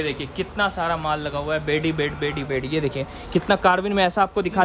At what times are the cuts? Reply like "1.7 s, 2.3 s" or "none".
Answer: none